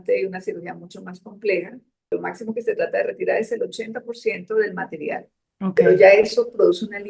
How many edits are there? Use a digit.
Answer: 1